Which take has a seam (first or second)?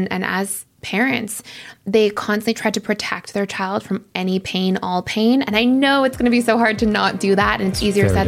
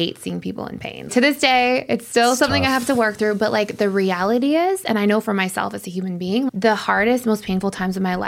second